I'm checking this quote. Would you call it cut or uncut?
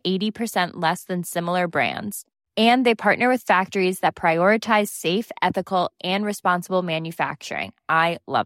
uncut